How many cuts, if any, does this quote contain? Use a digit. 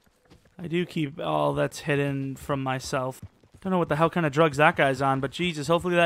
1